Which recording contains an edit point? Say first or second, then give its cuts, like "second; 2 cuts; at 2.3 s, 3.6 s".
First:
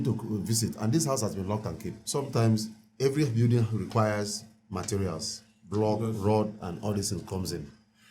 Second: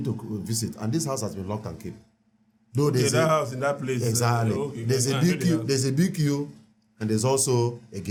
first; 1 cut; at 2.0 s